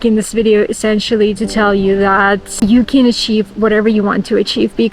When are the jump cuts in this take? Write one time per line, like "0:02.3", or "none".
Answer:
0:02.5